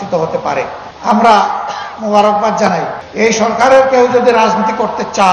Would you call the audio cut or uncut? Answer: cut